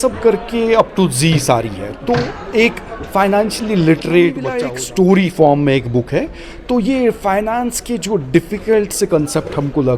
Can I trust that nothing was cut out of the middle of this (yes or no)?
no